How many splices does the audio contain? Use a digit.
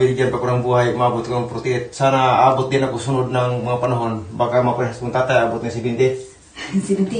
0